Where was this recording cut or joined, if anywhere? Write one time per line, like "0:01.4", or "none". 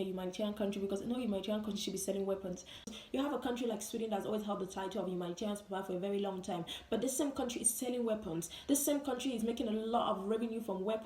0:02.9